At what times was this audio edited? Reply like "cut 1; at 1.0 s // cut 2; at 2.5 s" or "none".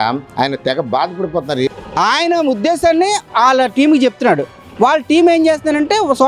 cut 1; at 1.6 s